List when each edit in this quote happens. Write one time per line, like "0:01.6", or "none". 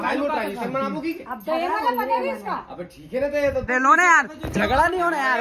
0:03.7

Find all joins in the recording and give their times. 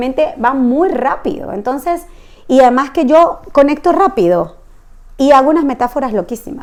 none

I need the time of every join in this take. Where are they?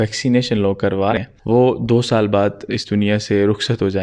0:01.2

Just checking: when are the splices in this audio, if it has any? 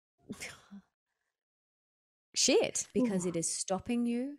0:02.8

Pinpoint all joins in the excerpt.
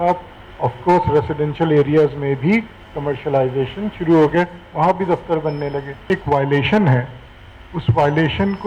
0:06.0

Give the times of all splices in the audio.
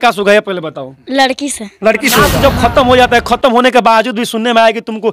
0:02.3

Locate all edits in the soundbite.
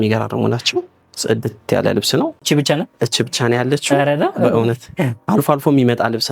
0:02.4

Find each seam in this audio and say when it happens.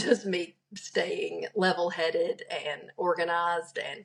none

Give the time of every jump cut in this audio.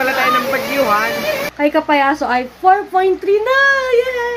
0:01.5

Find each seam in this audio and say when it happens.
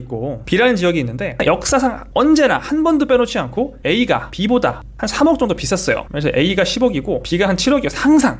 0:01.4

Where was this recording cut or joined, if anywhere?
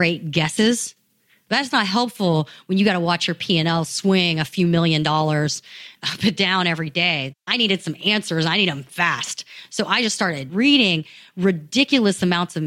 0:07.4
0:10.5

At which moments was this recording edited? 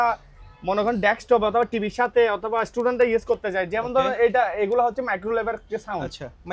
none

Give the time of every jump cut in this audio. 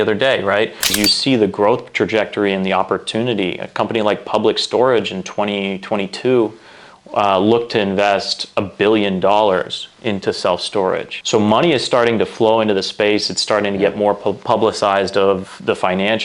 0:00.9

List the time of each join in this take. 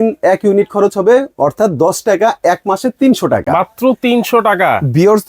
none

